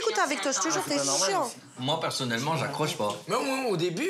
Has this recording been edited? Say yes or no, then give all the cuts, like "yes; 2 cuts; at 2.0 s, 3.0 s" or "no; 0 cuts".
yes; 1 cut; at 1.7 s